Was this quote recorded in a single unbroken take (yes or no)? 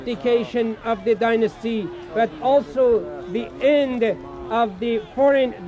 no